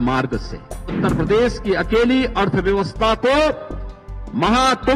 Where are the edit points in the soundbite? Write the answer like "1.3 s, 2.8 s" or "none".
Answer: 1.0 s